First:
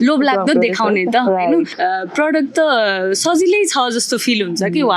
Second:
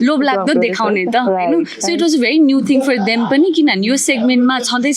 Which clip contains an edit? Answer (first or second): first